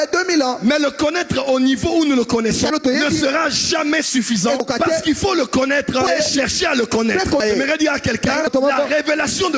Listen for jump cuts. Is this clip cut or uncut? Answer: cut